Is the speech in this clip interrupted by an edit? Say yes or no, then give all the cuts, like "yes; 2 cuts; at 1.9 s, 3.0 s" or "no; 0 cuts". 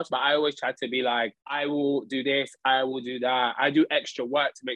no; 0 cuts